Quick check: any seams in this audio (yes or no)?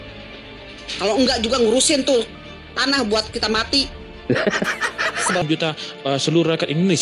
yes